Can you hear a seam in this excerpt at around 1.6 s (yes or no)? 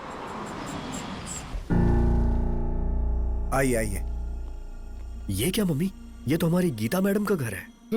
yes